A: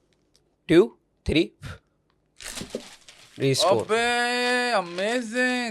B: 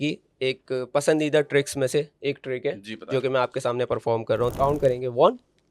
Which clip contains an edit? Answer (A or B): B